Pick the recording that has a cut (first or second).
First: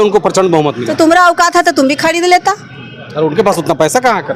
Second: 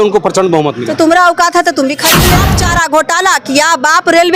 second